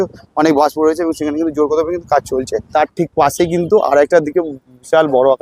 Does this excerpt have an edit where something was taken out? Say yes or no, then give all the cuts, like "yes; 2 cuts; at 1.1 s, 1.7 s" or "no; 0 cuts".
yes; 1 cut; at 2.7 s